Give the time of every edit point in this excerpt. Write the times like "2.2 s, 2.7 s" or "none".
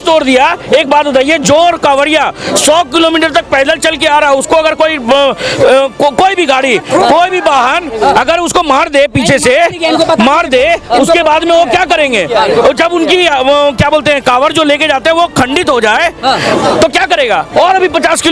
none